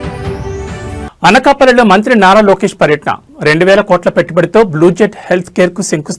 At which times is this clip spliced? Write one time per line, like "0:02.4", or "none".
0:01.0